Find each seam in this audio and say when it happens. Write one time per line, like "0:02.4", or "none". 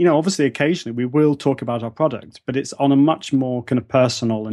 none

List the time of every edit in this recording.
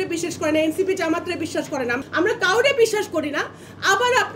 0:01.9

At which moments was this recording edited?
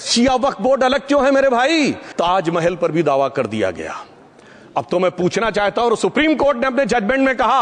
0:02.0

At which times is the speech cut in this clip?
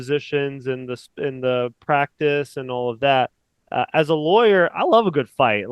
none

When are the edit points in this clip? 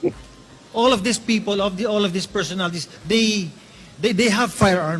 0:03.0

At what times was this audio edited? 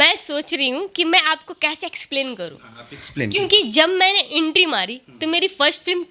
none

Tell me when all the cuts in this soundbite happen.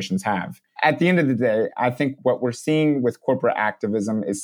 0:00.8
0:02.2

